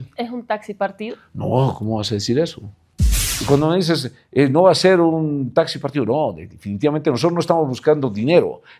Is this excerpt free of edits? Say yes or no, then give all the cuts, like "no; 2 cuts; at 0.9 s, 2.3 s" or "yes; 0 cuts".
no; 1 cut; at 3.3 s